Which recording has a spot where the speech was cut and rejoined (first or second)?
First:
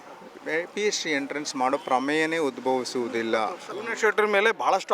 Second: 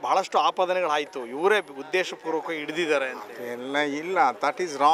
first